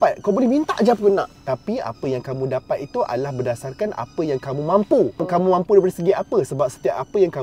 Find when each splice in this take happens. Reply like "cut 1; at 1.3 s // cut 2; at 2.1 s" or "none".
cut 1; at 1.4 s